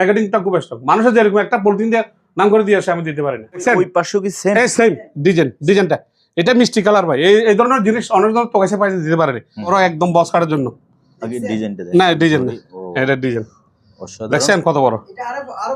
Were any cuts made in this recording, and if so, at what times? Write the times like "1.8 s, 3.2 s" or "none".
3.6 s, 9.7 s

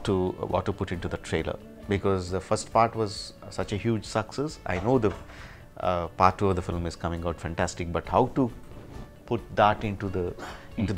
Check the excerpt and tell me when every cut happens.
none

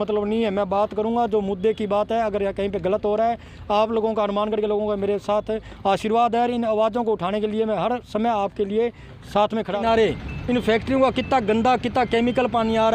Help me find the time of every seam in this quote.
9.8 s

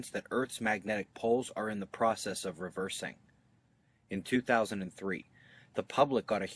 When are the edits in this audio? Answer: 4.2 s

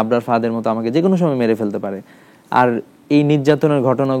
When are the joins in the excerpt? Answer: none

